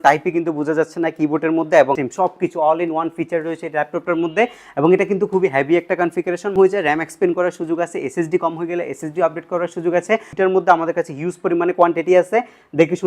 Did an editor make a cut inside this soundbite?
yes; 3 cuts; at 2.1 s, 6.5 s, 10.3 s

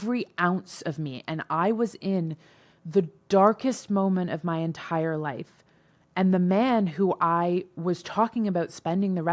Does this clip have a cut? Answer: no; 0 cuts

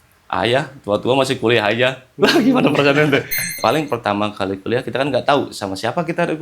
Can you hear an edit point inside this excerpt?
yes; 1 cut; at 3.6 s

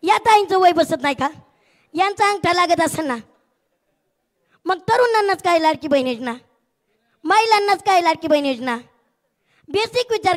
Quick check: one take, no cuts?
yes; 0 cuts

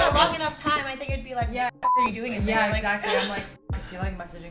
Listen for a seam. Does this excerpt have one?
no; 0 cuts

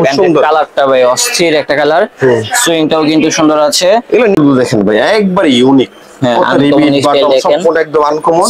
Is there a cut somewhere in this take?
yes; 1 cut; at 4.4 s

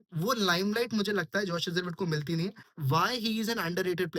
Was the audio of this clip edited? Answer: yes; 1 cut; at 2.7 s

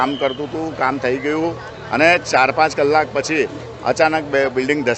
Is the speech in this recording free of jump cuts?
yes; 0 cuts

